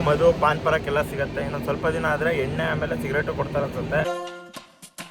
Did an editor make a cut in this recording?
no; 0 cuts

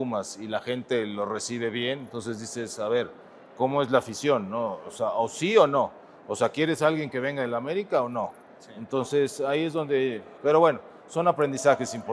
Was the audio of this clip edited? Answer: no; 0 cuts

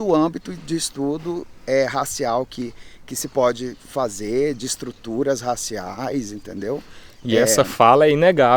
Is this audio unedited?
yes; 0 cuts

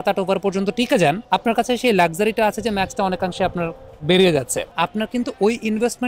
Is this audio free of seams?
no; 2 cuts; at 1.2 s, 4.6 s

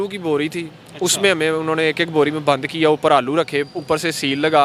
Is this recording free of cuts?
yes; 0 cuts

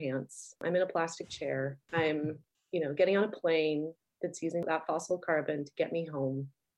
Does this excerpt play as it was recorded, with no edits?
no; 2 cuts; at 1.8 s, 2.5 s

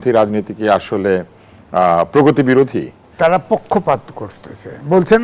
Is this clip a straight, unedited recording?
no; 1 cut; at 3.1 s

